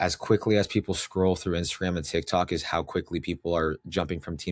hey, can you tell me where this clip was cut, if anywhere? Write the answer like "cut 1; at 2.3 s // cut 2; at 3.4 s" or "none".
none